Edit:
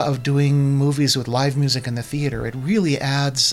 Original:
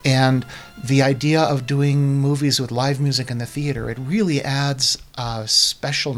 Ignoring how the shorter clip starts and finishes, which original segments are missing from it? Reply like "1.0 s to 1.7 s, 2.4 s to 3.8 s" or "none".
none